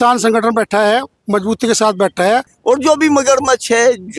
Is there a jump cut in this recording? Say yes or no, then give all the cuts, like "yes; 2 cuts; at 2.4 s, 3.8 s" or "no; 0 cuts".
yes; 1 cut; at 2.5 s